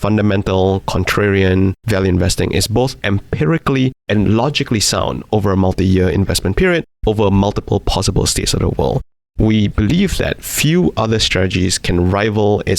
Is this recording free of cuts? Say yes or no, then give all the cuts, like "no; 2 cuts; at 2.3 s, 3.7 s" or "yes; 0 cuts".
no; 1 cut; at 9.1 s